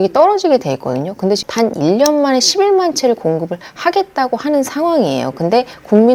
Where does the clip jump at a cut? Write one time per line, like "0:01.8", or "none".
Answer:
0:01.4

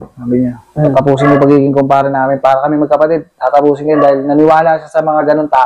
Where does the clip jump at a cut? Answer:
none

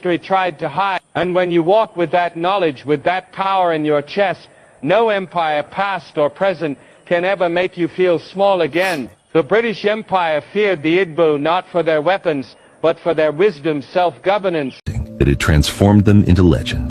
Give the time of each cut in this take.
0:15.0

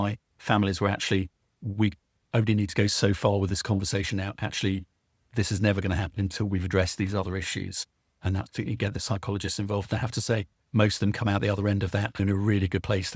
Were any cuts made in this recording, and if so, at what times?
0:12.2

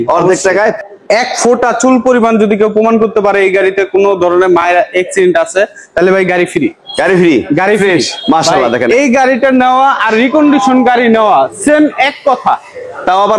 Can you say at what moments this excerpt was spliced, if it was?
0:00.8
0:08.9

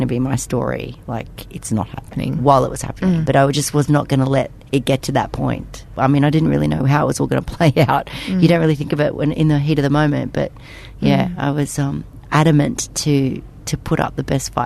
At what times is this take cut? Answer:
0:02.1
0:03.2
0:05.8

